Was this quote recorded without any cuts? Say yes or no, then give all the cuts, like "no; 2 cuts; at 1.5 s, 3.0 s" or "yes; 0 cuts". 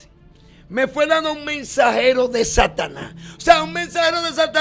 yes; 0 cuts